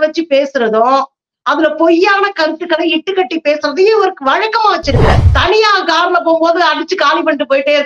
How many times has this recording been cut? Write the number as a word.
one